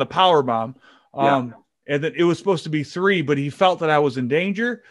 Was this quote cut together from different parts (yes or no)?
no